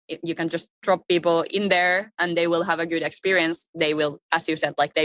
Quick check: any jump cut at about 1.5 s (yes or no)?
yes